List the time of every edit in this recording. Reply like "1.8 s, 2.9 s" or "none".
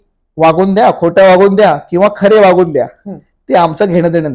none

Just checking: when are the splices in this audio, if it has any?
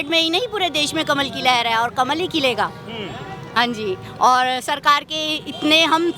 none

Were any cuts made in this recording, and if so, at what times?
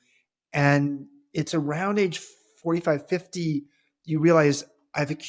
none

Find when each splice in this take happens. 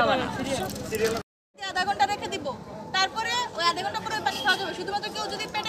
1.4 s

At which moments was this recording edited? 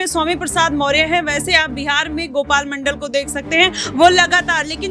none

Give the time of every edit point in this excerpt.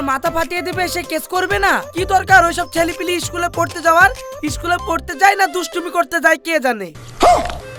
none

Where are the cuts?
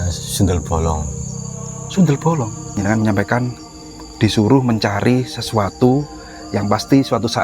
2.8 s

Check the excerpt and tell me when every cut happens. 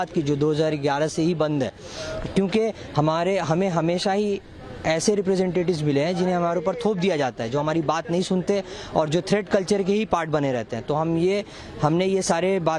none

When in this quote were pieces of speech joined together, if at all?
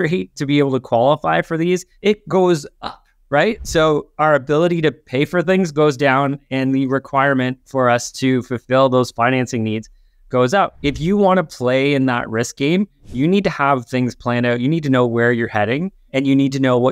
1.9 s, 10.8 s, 16.0 s

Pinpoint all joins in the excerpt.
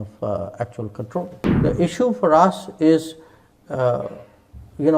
1.4 s

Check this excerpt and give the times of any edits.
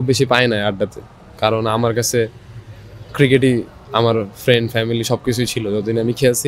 none

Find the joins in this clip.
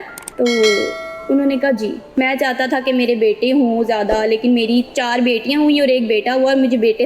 2.0 s

